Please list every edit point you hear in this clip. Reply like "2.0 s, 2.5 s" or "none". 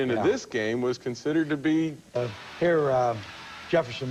none